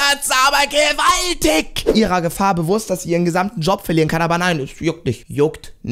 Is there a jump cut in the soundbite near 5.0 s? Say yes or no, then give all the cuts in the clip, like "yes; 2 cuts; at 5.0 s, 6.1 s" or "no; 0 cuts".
no; 1 cut; at 1.8 s